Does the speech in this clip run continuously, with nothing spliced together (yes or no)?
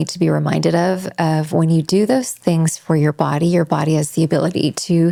yes